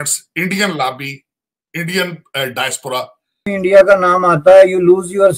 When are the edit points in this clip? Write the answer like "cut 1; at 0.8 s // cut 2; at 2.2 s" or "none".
cut 1; at 3.5 s